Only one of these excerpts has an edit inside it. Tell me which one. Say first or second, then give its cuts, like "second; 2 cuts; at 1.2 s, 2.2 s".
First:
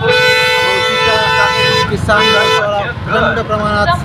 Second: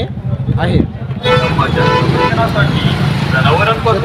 second; 1 cut; at 1.2 s